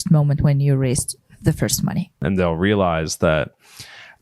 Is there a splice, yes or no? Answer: yes